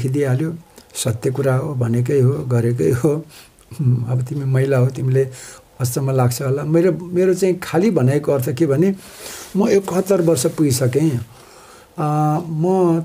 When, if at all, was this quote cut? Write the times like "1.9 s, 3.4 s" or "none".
none